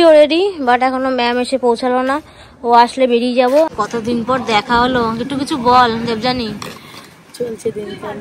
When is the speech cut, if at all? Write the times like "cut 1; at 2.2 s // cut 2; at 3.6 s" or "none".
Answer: cut 1; at 3.7 s